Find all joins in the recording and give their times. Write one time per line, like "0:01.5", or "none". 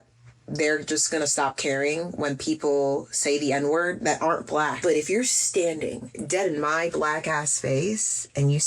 0:04.8
0:06.1